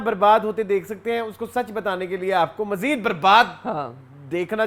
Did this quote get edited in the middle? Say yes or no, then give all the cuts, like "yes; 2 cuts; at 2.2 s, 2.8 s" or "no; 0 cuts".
no; 0 cuts